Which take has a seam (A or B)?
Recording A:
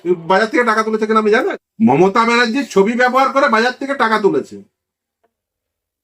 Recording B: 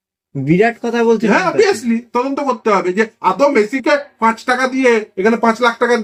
A